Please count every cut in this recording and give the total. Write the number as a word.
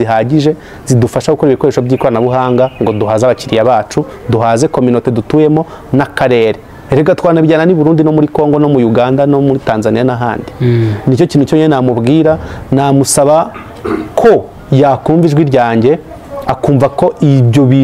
zero